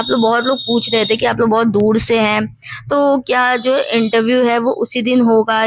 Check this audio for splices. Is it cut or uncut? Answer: uncut